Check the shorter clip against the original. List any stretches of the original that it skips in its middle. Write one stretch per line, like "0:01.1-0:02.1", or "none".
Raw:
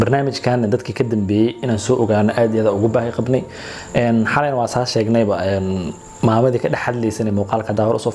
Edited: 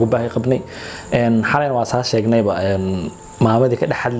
none